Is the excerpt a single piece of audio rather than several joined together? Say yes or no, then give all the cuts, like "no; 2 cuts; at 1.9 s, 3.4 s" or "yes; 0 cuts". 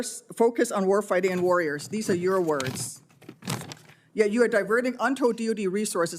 yes; 0 cuts